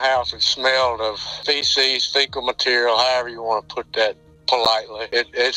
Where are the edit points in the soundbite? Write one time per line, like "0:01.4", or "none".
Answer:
none